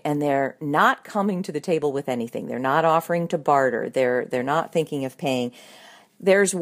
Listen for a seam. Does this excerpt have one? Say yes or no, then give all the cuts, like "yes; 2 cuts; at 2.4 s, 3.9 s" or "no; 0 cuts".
no; 0 cuts